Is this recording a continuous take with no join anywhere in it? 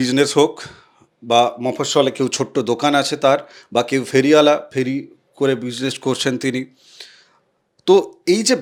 yes; 0 cuts

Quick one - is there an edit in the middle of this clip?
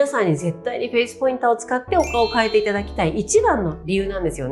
no; 0 cuts

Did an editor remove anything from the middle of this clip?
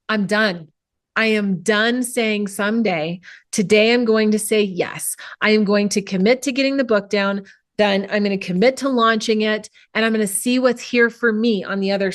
no; 0 cuts

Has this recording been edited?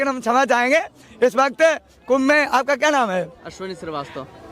no; 0 cuts

